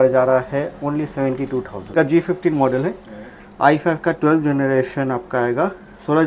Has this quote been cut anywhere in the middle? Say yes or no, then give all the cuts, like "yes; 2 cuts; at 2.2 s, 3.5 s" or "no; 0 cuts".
yes; 1 cut; at 1.9 s